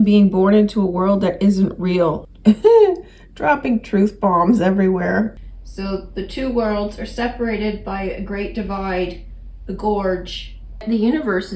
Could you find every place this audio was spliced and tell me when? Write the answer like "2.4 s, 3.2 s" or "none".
2.3 s, 5.4 s, 10.8 s